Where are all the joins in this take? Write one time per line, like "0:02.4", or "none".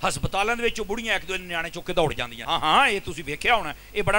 0:02.3